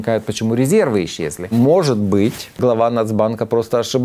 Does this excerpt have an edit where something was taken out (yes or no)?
yes